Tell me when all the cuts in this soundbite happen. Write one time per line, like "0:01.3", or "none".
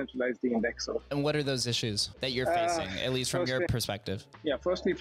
0:01.1
0:02.1
0:03.7